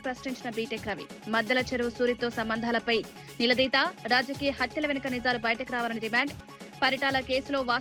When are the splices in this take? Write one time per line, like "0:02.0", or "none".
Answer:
none